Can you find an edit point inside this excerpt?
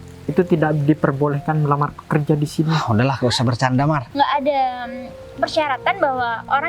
yes; 1 cut; at 4.0 s

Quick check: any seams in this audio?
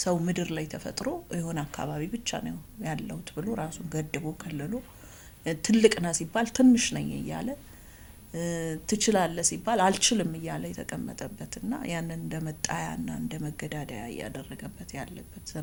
no; 0 cuts

